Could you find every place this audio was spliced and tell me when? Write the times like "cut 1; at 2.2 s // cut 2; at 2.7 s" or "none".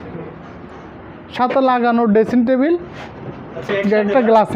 none